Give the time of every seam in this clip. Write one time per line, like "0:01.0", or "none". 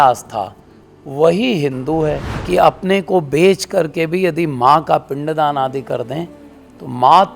0:02.3